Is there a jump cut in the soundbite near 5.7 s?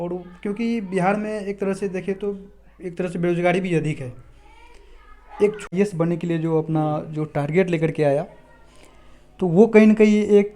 yes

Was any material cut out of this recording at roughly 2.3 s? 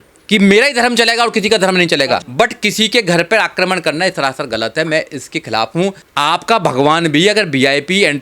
yes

